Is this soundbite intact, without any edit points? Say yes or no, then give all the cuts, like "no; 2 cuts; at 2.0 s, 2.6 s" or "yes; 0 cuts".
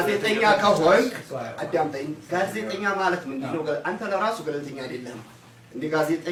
yes; 0 cuts